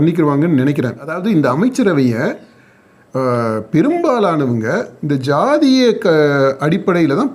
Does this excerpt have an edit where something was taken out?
yes; 1 cut; at 1.2 s

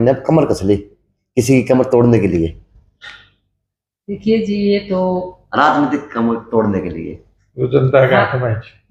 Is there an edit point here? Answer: no; 0 cuts

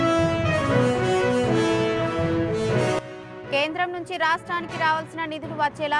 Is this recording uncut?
yes; 0 cuts

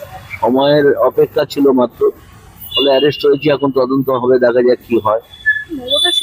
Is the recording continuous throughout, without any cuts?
yes; 0 cuts

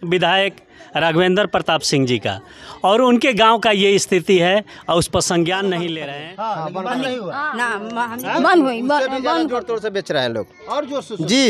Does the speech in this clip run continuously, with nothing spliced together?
no; 1 cut; at 6.0 s

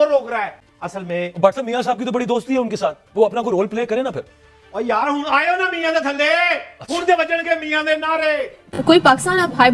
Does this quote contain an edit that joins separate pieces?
yes; 1 cut; at 8.7 s

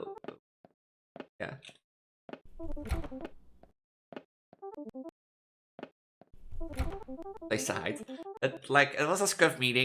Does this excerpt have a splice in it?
no; 0 cuts

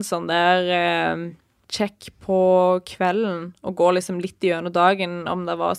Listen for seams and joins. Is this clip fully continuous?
yes; 0 cuts

